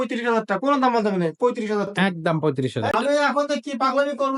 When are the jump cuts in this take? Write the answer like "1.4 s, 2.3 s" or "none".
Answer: 2.9 s